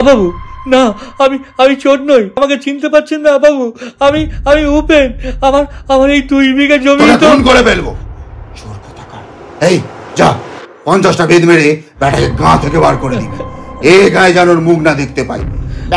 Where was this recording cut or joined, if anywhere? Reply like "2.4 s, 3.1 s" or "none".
2.4 s

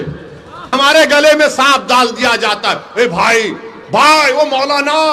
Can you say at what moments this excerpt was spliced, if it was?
0.9 s

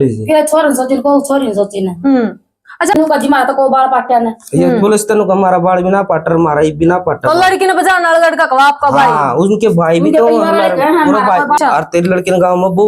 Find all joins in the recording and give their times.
3.0 s, 11.6 s

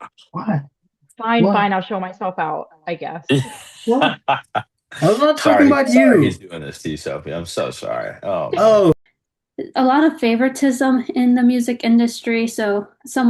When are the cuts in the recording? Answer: 9.2 s

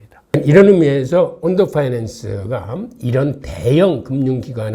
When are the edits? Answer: none

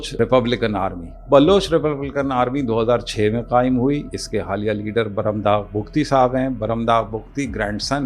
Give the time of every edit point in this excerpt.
none

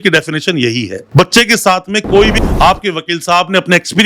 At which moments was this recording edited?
2.4 s

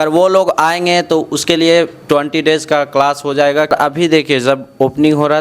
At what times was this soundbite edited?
3.7 s

